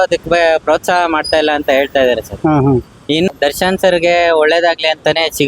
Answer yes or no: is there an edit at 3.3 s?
yes